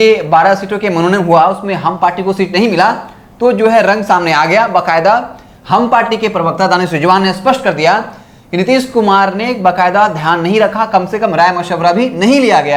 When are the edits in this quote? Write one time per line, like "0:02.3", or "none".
none